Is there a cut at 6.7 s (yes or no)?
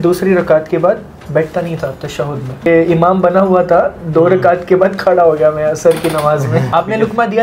yes